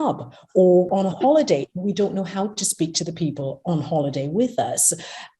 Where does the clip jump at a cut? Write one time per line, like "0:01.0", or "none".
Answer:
0:00.9

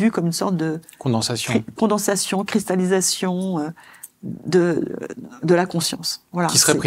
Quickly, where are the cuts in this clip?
none

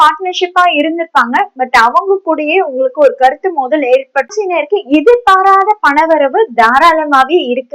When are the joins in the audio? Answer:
0:04.3

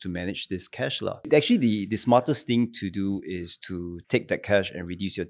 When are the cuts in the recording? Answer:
0:01.3
0:03.9

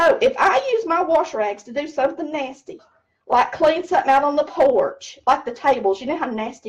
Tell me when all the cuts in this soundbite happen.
none

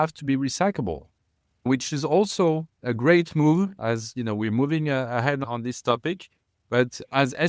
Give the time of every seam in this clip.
0:01.7

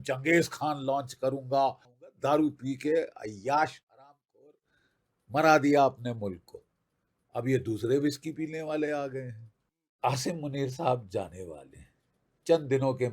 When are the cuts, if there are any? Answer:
0:02.2
0:10.0

